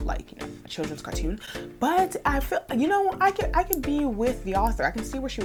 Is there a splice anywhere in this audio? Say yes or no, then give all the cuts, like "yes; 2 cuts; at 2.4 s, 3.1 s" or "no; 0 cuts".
no; 0 cuts